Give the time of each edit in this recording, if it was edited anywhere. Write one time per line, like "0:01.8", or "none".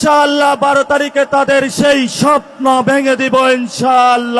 none